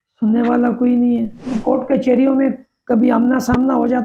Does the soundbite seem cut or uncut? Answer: cut